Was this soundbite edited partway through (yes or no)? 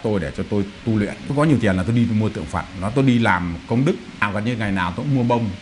yes